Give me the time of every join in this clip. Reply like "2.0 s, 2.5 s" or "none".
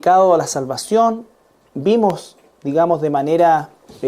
2.8 s